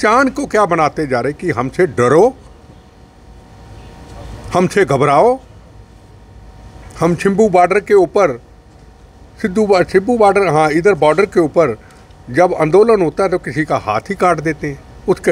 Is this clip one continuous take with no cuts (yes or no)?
yes